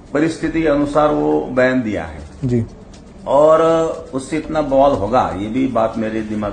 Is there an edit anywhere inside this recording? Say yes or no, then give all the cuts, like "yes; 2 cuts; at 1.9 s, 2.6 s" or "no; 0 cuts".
no; 0 cuts